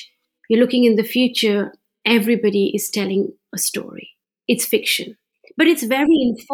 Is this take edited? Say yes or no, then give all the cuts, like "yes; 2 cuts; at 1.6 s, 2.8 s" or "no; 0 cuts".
no; 0 cuts